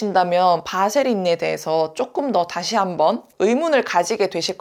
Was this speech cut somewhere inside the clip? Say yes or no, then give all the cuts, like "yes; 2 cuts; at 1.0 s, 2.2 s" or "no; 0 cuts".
no; 0 cuts